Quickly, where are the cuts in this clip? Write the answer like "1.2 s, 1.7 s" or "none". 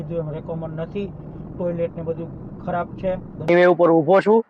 3.5 s